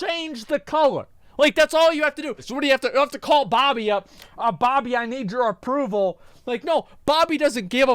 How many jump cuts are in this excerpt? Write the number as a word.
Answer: two